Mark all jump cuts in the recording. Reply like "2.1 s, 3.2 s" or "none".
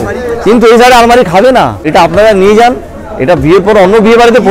1.8 s